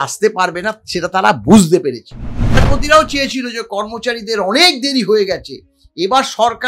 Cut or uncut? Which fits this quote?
cut